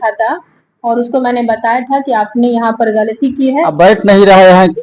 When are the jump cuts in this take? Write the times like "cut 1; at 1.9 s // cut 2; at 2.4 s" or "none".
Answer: cut 1; at 3.5 s